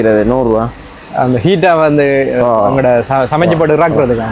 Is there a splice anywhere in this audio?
no; 0 cuts

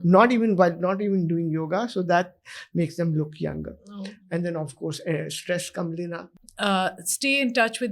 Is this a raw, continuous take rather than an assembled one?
no; 1 cut; at 6.3 s

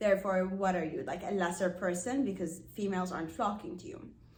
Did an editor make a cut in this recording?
no; 0 cuts

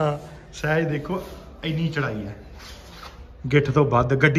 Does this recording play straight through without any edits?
yes; 0 cuts

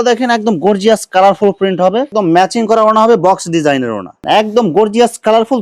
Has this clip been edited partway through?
yes; 2 cuts; at 2.1 s, 4.1 s

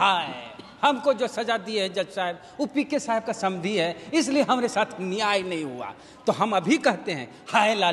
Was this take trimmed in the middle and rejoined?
no; 0 cuts

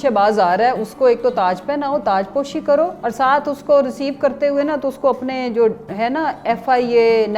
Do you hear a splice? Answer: no; 0 cuts

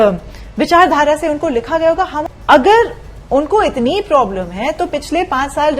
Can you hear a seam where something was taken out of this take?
yes; 1 cut; at 2.2 s

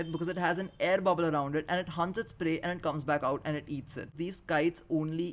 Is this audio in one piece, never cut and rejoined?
no; 1 cut; at 4.1 s

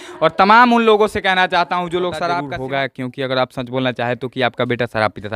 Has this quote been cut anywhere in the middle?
yes; 1 cut; at 2.4 s

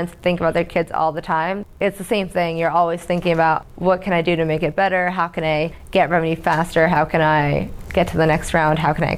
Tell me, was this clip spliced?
yes; 2 cuts; at 1.7 s, 3.6 s

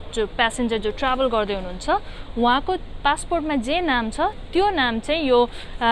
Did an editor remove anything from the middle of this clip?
no; 0 cuts

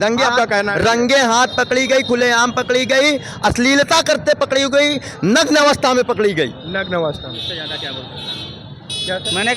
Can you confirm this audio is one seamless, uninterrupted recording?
yes; 0 cuts

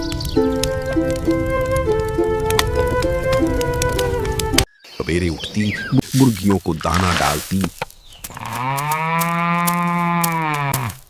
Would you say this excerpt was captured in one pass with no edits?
no; 1 cut; at 1.0 s

